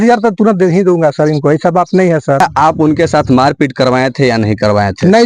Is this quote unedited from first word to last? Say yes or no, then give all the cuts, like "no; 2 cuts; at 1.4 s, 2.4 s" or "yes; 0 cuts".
no; 1 cut; at 2.4 s